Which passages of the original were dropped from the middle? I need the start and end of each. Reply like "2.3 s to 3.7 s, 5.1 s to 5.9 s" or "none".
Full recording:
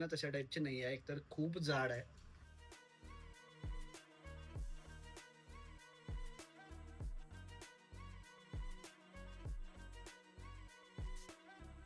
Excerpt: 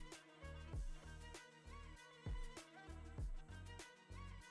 none

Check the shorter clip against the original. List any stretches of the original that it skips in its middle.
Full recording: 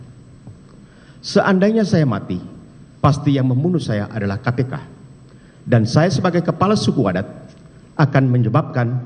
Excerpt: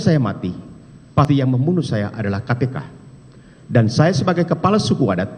3.1 s to 3.2 s

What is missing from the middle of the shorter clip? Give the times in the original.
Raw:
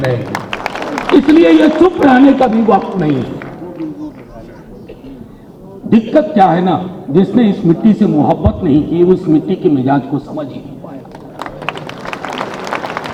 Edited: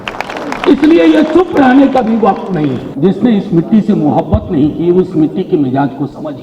3.3 s to 7.0 s

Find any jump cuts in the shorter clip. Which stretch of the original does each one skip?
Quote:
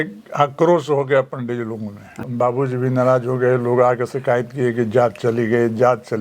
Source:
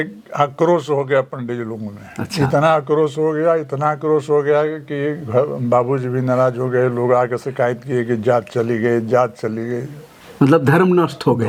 2.3 s to 5.6 s

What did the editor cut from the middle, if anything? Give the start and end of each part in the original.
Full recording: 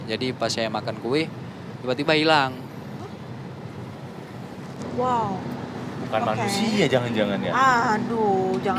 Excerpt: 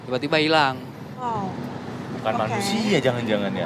3.0 s to 5.1 s

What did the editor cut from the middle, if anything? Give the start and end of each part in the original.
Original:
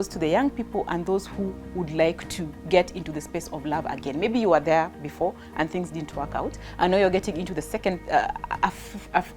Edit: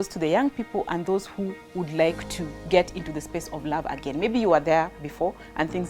none

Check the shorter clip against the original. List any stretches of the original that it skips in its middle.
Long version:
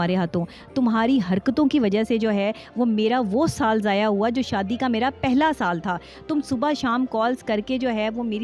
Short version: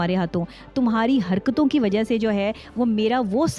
none

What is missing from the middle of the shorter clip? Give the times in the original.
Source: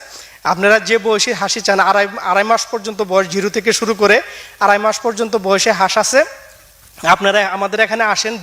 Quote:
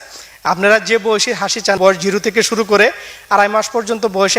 1.8 s to 3.1 s

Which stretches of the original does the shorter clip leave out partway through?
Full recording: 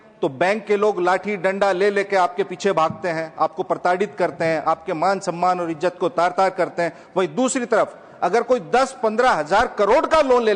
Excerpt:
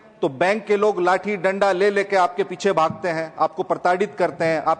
none

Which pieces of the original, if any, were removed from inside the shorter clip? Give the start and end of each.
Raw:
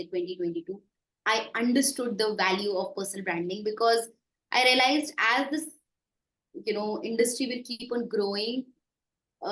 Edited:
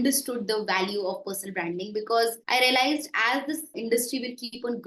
4.1 s to 4.4 s, 5.8 s to 7.0 s

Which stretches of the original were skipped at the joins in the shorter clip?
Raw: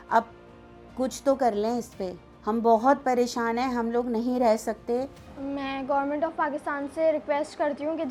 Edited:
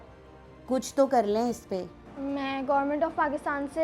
2.3 s to 5.2 s

